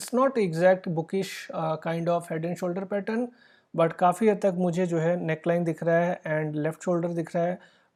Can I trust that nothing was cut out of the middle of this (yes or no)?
yes